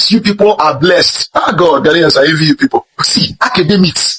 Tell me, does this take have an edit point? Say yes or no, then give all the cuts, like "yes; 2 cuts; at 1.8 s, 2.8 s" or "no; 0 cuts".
yes; 2 cuts; at 1.1 s, 3.0 s